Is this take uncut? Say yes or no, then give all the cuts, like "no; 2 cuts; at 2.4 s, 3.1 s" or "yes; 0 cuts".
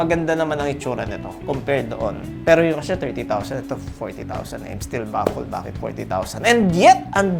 yes; 0 cuts